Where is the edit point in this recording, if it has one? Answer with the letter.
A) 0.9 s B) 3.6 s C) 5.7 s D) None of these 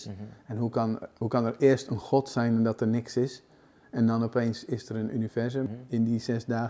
C